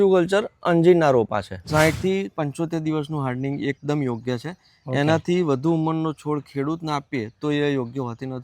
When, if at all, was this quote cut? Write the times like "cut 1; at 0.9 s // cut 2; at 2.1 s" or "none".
cut 1; at 1.6 s

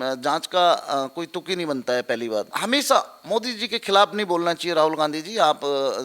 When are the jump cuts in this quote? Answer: cut 1; at 2.5 s

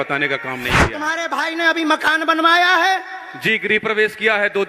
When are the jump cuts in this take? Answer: cut 1; at 1.0 s

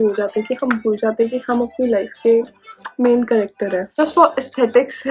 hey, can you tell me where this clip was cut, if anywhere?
cut 1; at 4.0 s

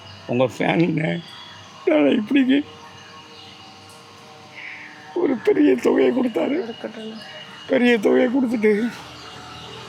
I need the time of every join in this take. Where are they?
none

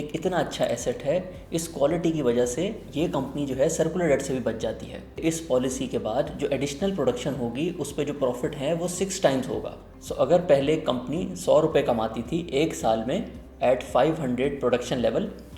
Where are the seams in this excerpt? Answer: cut 1; at 5.2 s

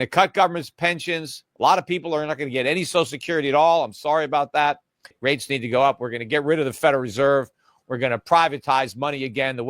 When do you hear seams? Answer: cut 1; at 5.1 s

